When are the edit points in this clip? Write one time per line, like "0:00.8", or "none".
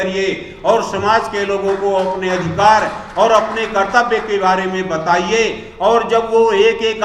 none